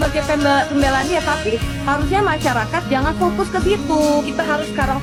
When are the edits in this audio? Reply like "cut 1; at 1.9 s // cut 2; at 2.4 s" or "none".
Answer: none